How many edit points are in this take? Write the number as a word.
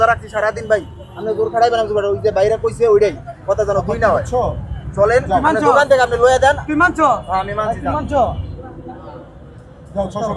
zero